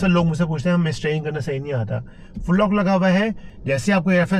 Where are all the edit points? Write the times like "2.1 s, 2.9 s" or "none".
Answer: 3.5 s